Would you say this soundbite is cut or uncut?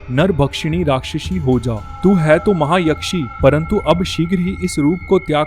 uncut